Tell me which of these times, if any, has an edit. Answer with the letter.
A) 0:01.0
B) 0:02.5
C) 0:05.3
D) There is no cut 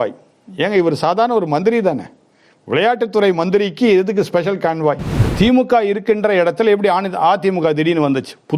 C